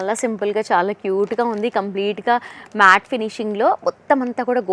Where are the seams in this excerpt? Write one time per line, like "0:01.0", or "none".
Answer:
none